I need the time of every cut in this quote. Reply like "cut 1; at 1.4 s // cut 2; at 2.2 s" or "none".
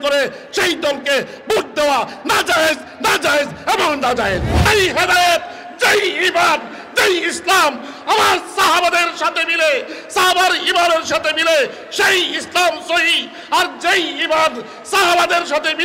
cut 1; at 4.5 s